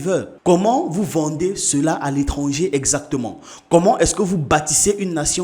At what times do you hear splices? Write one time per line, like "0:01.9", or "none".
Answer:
none